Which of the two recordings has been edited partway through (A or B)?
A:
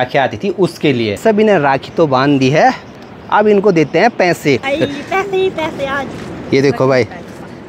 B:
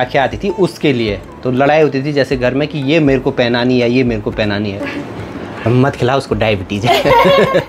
A